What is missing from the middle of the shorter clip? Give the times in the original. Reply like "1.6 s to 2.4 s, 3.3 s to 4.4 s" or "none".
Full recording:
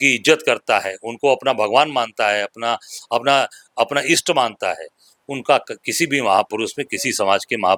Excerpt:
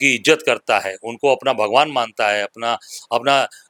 none